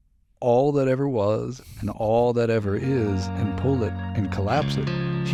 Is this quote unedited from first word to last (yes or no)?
yes